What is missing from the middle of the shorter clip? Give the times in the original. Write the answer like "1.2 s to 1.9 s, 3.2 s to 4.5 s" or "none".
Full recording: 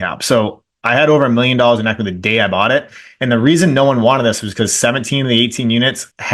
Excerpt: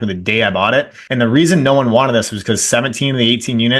3.0 s to 3.1 s